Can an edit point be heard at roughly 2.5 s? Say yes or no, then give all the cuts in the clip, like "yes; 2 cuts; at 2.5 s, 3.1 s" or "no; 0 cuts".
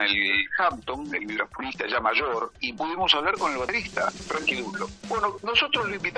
yes; 2 cuts; at 2.5 s, 5.0 s